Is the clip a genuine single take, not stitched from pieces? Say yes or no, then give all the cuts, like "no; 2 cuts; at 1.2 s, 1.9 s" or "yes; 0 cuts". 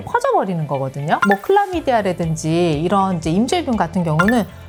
yes; 0 cuts